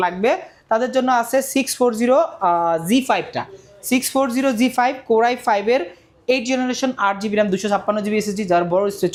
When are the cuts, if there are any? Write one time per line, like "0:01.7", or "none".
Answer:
none